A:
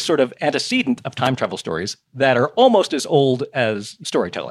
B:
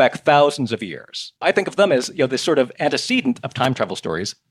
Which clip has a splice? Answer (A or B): B